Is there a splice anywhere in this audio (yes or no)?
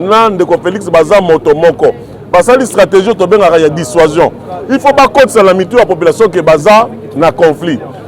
no